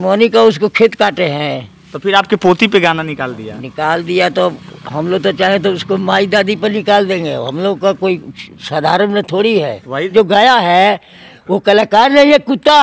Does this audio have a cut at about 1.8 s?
no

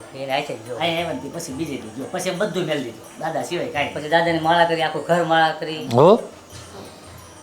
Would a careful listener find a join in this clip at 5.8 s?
yes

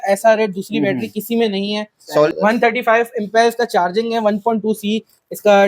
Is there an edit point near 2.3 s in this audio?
yes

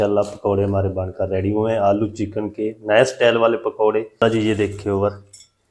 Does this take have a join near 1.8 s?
no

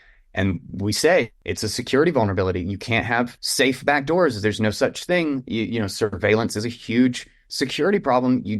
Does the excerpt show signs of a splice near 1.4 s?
yes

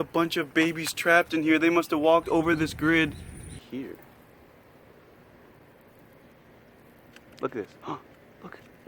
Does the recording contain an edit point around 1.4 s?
no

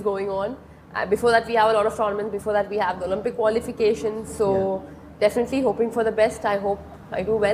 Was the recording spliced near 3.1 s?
no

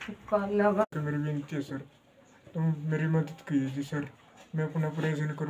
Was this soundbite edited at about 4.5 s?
no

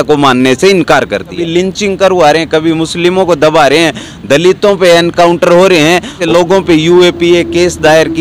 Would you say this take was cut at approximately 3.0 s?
no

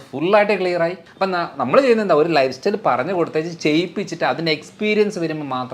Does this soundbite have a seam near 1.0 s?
yes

